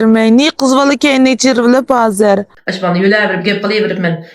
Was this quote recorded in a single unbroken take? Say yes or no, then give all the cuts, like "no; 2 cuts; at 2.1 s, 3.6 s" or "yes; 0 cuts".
no; 1 cut; at 2.6 s